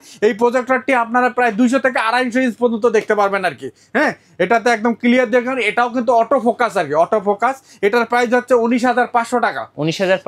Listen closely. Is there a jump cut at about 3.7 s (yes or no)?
no